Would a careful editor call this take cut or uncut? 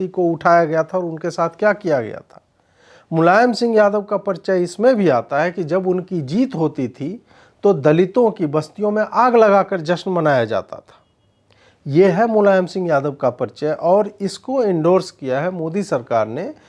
uncut